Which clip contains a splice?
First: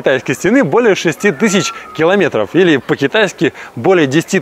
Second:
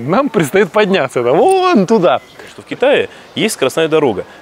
second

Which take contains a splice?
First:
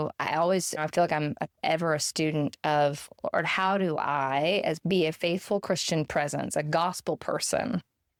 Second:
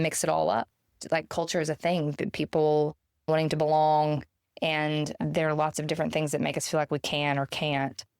second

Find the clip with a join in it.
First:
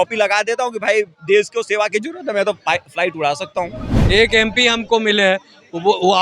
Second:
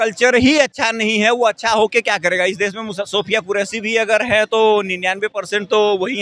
first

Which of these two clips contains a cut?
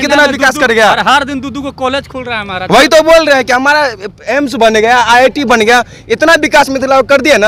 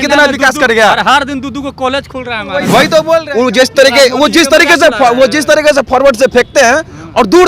second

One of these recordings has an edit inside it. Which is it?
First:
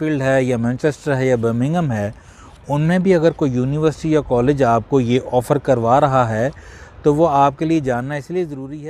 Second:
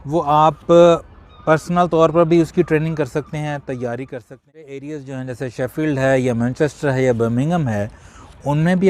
second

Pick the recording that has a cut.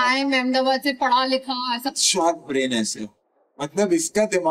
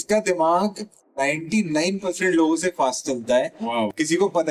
first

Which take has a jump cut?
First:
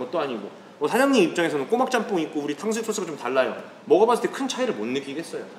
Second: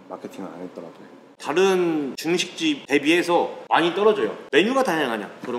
second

